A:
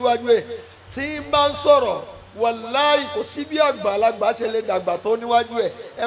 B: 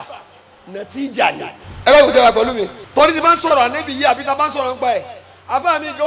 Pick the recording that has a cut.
B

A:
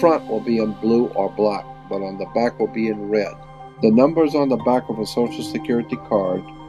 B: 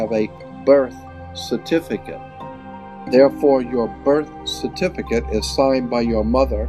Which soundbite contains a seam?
B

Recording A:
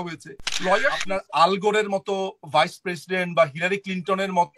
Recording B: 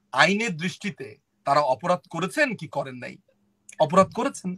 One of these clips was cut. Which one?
A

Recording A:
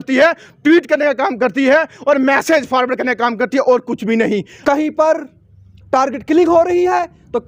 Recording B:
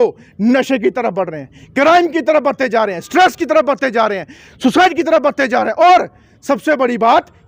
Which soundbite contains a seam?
A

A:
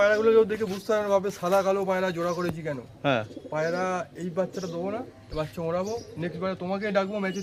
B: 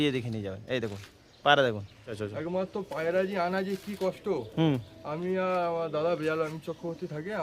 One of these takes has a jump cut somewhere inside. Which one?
B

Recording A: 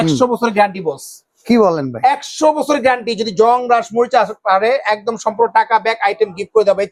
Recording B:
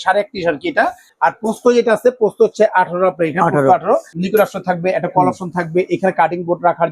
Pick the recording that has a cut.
B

